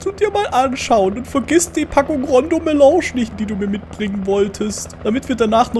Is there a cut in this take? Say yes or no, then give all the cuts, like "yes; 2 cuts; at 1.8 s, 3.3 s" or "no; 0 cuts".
yes; 2 cuts; at 3.3 s, 4.9 s